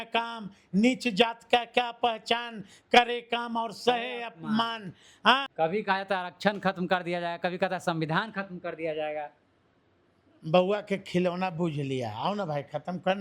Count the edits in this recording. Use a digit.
1